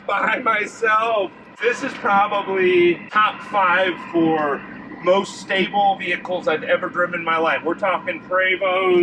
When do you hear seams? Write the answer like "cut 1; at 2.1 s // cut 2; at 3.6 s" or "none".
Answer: cut 1; at 1.5 s // cut 2; at 3.1 s